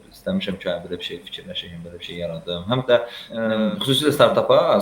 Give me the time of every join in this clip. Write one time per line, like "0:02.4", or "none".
0:03.2